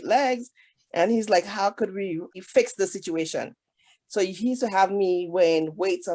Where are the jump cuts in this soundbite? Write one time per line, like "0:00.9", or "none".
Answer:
0:02.3

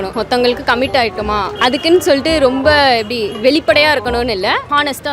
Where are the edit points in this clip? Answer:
0:01.5

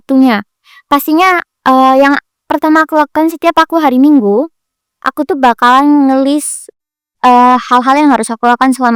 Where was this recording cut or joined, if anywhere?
none

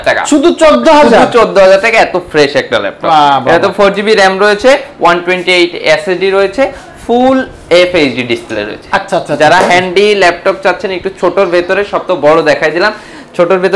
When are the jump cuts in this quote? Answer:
none

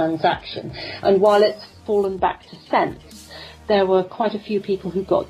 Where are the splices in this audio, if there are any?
0:01.8

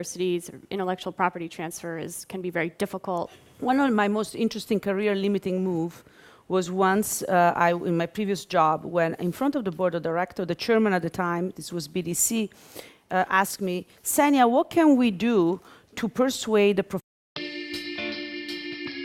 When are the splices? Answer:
none

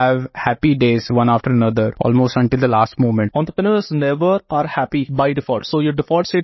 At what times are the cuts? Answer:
0:01.9
0:03.3
0:05.1

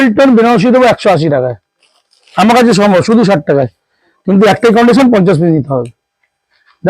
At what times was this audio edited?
0:02.2

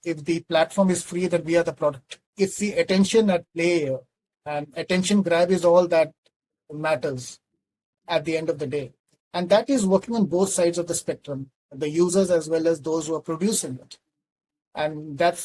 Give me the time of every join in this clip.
0:02.3

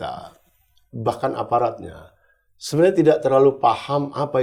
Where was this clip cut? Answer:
none

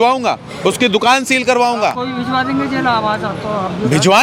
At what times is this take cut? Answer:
none

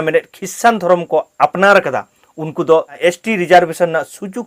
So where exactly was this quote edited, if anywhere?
none

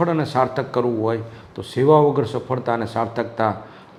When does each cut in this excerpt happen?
none

